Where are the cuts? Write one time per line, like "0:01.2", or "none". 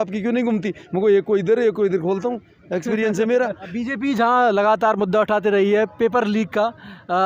0:03.7